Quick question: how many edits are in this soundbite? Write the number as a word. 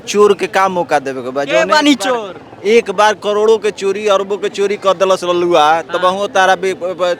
zero